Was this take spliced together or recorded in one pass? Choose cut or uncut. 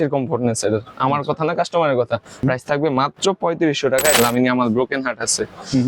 cut